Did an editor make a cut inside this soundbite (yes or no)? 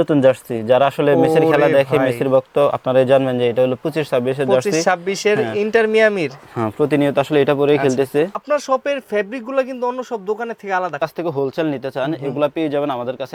yes